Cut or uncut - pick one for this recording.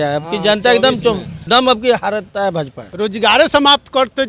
cut